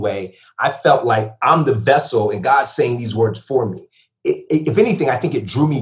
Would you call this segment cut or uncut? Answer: uncut